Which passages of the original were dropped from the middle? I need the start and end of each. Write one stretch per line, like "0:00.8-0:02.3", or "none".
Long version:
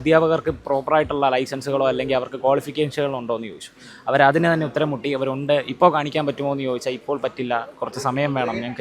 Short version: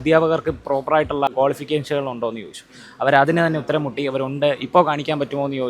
0:01.3-0:02.4